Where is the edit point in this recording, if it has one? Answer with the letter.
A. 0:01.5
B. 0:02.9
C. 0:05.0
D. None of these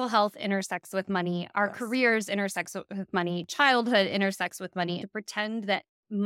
C